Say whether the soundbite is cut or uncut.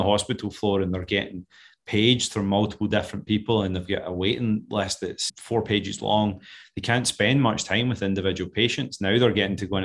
uncut